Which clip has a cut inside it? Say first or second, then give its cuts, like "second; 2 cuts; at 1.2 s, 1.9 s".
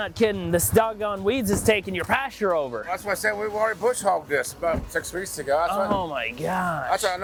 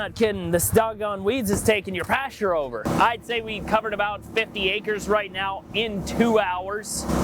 second; 1 cut; at 2.8 s